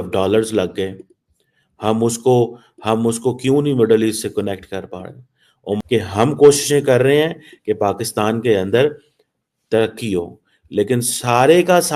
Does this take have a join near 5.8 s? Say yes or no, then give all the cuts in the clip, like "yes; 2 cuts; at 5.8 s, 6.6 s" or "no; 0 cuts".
yes; 1 cut; at 5.8 s